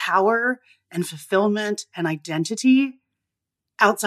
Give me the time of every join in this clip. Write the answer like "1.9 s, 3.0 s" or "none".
none